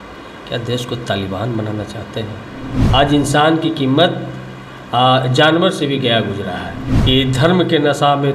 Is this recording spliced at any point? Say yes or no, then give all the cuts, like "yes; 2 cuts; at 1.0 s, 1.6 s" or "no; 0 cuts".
yes; 2 cuts; at 2.7 s, 6.9 s